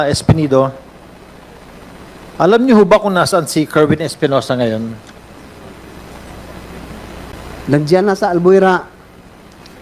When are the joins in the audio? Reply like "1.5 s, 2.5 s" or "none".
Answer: 7.3 s